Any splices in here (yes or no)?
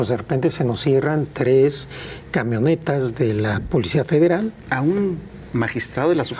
no